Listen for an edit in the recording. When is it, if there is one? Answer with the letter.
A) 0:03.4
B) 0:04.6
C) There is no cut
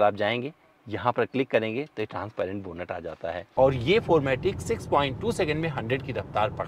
A